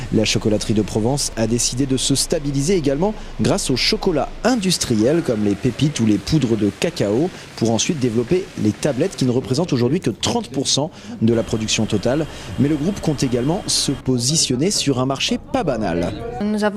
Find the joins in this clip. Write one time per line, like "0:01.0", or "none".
0:11.9